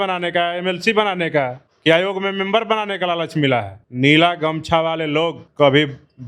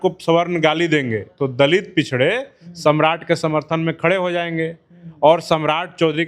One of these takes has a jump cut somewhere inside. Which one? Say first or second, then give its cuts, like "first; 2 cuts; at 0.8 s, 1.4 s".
first; 3 cuts; at 1.7 s, 3.8 s, 5.4 s